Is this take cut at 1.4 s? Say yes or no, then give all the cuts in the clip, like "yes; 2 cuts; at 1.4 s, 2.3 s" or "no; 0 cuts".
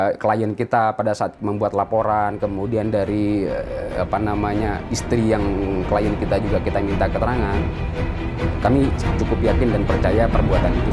no; 0 cuts